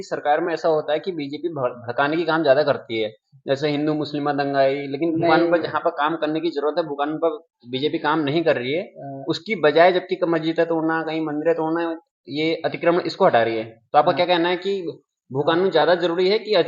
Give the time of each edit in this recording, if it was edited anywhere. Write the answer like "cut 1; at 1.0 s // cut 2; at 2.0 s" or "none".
none